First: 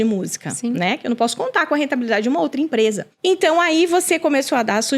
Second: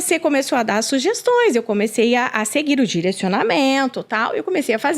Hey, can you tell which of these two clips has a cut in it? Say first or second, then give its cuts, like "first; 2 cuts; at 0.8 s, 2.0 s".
first; 1 cut; at 3.1 s